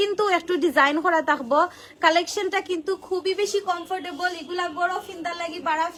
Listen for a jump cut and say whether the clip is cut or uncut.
uncut